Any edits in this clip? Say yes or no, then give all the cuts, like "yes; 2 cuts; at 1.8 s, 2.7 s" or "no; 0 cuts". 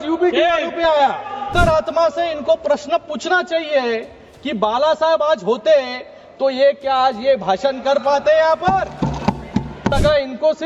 yes; 2 cuts; at 1.5 s, 9.9 s